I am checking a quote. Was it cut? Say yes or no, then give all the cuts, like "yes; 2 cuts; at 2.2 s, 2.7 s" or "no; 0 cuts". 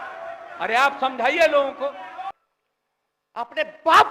yes; 1 cut; at 2.3 s